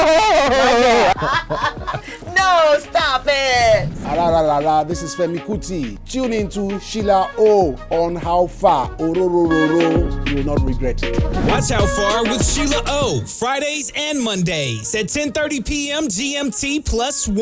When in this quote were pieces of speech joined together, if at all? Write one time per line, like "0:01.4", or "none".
none